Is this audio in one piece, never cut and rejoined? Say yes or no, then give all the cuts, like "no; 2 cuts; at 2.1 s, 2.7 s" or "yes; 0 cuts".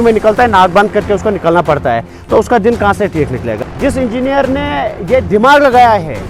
no; 1 cut; at 3.5 s